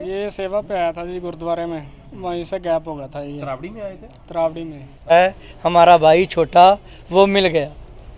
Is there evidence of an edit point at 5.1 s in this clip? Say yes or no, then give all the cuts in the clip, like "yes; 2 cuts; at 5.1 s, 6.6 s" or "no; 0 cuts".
yes; 1 cut; at 5.1 s